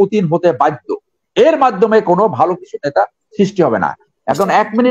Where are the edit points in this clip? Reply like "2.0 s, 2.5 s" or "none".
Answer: none